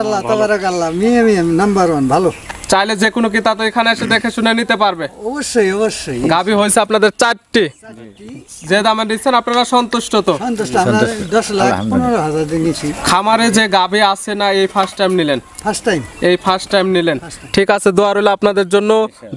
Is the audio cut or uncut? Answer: uncut